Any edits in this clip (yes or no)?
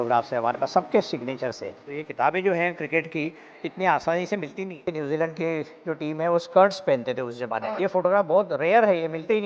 yes